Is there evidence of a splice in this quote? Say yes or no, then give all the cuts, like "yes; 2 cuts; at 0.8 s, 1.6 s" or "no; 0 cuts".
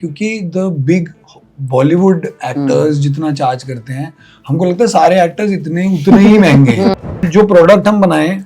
yes; 1 cut; at 7.2 s